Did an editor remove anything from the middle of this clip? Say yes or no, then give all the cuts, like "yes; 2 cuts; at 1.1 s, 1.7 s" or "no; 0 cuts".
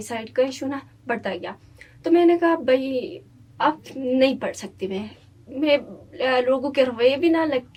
no; 0 cuts